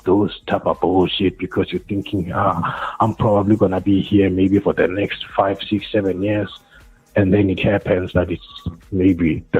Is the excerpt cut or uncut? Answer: uncut